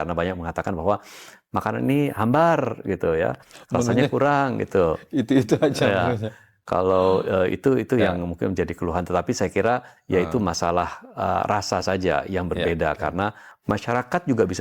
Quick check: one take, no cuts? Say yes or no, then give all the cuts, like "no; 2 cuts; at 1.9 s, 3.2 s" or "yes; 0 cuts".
no; 1 cut; at 13.5 s